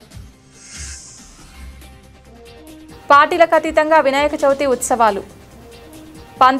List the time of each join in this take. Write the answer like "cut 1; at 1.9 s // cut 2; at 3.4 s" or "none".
cut 1; at 2.9 s